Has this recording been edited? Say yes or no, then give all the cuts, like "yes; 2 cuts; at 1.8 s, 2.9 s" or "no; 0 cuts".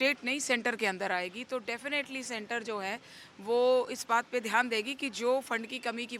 no; 0 cuts